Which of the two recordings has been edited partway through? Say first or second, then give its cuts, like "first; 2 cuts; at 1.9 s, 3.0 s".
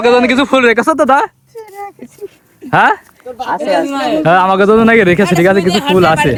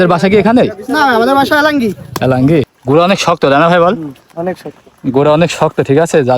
second; 1 cut; at 2.8 s